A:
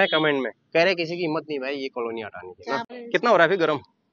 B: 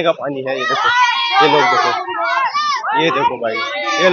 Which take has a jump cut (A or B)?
A